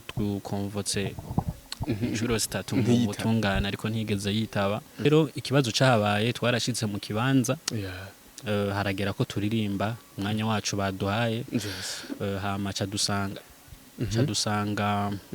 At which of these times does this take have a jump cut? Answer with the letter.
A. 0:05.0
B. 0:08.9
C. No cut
A